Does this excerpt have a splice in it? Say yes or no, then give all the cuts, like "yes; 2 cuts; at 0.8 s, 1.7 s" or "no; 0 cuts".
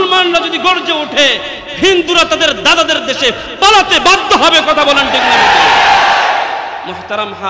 no; 0 cuts